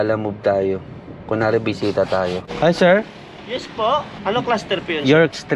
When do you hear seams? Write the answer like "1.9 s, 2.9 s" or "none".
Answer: 2.5 s, 4.2 s